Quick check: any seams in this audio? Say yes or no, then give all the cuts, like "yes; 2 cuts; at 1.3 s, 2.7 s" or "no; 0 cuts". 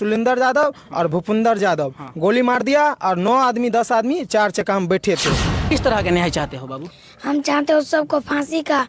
yes; 1 cut; at 5.7 s